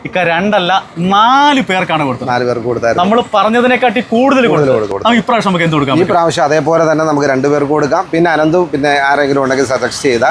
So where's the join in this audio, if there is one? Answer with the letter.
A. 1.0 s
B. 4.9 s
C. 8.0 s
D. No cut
B